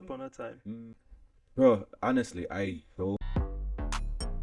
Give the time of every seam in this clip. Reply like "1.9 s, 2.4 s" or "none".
1.0 s, 3.2 s